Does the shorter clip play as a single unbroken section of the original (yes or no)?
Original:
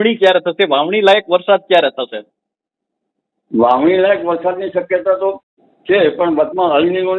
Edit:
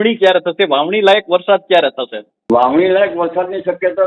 no